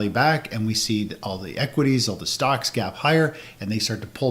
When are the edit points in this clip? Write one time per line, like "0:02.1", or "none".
none